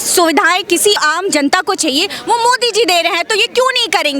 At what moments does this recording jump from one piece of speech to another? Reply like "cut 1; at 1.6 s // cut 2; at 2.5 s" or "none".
cut 1; at 1.0 s